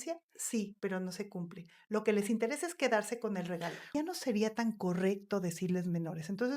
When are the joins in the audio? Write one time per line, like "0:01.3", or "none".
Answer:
0:03.8